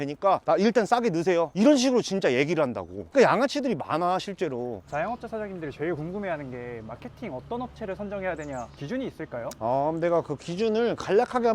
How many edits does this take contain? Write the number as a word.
two